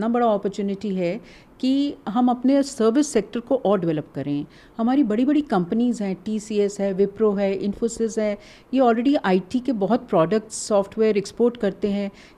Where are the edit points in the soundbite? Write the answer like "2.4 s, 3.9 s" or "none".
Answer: none